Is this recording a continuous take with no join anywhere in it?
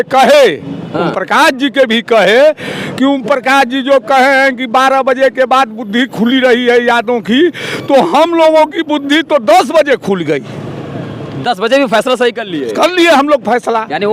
yes; 0 cuts

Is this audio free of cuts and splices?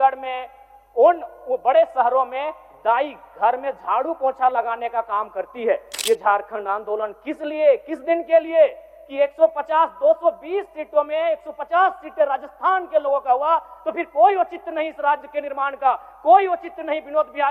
no; 1 cut; at 5.9 s

